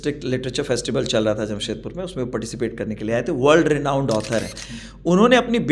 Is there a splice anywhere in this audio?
no; 0 cuts

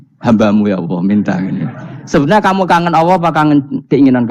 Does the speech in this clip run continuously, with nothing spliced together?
yes; 0 cuts

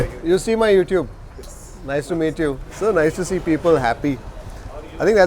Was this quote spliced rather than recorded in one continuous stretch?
yes; 1 cut; at 2.6 s

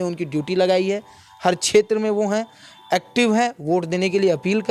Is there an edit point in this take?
no; 0 cuts

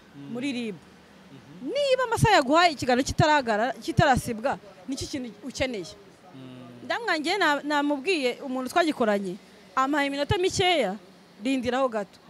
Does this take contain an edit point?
no; 0 cuts

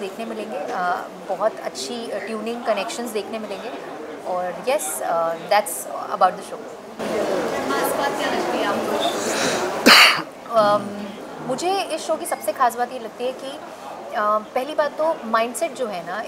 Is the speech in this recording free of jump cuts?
yes; 0 cuts

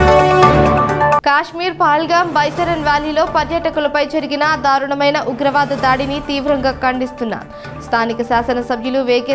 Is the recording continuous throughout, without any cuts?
yes; 0 cuts

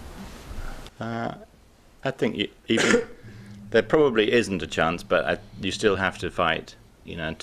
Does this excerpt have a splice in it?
yes; 1 cut; at 5.3 s

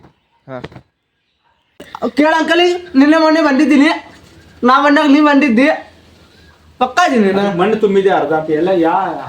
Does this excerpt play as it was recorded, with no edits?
no; 1 cut; at 1.9 s

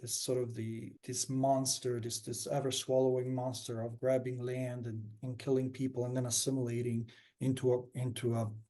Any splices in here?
yes; 1 cut; at 0.9 s

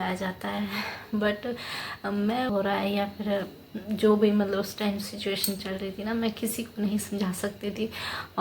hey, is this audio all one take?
no; 1 cut; at 2.5 s

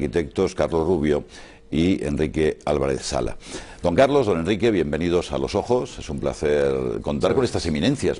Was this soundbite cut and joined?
yes; 1 cut; at 3.8 s

